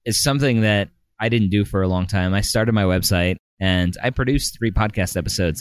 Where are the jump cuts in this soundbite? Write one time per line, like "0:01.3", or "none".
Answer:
none